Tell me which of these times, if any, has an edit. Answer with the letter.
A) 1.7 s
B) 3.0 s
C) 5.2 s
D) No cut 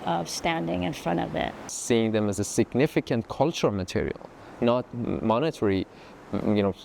A